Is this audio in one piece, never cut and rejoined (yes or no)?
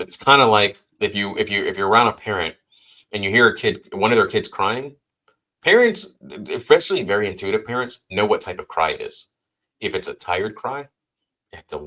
yes